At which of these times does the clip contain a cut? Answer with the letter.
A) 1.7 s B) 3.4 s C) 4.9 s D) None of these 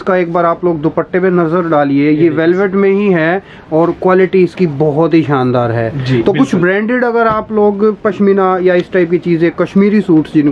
D